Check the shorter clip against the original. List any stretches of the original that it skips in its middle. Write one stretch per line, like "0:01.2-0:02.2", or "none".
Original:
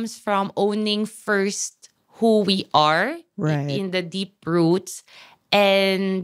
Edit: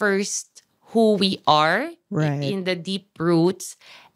none